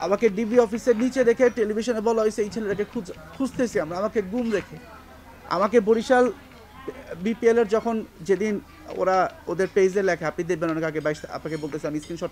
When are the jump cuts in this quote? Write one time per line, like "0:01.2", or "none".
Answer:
none